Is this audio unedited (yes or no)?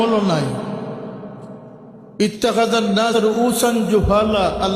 no